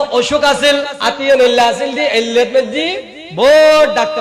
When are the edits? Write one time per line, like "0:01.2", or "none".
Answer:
0:01.0